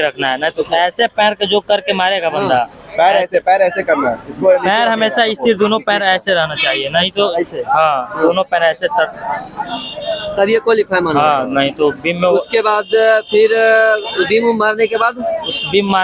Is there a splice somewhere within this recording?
no; 0 cuts

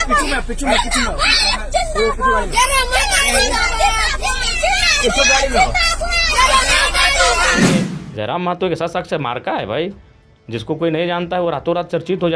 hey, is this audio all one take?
no; 1 cut; at 7.6 s

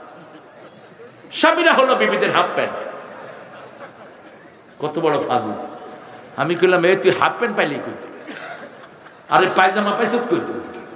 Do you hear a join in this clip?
no; 0 cuts

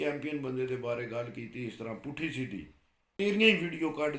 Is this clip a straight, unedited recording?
no; 1 cut; at 3.1 s

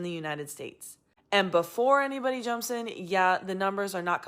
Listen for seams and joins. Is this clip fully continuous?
yes; 0 cuts

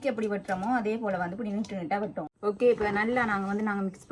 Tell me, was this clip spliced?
yes; 1 cut; at 2.2 s

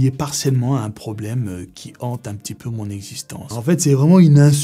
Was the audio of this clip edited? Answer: yes; 1 cut; at 3.5 s

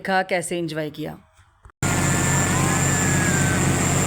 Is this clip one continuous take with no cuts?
yes; 0 cuts

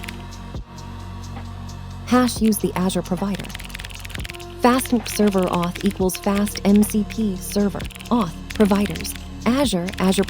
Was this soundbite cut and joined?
yes; 1 cut; at 2.1 s

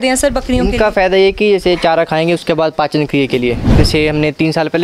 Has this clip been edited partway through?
yes; 1 cut; at 3.7 s

